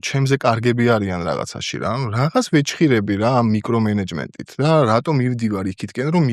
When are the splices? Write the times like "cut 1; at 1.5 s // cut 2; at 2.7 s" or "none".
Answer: none